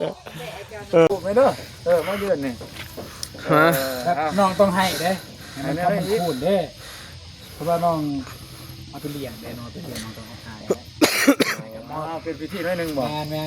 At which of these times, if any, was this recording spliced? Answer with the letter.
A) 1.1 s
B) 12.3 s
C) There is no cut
A